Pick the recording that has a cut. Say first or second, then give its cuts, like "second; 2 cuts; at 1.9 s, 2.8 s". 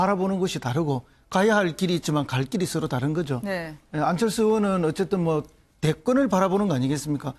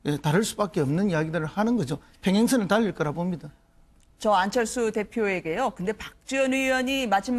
first; 1 cut; at 5.6 s